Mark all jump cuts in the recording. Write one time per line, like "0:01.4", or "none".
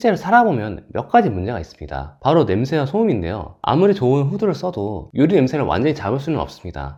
none

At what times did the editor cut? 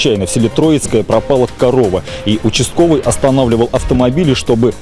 none

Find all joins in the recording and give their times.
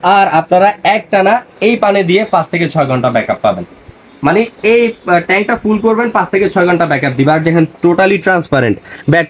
none

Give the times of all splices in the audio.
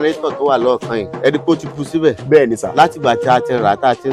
0:01.1

